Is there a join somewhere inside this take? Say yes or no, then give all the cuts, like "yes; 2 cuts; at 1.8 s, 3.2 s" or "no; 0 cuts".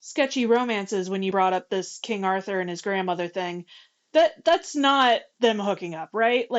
yes; 1 cut; at 5.3 s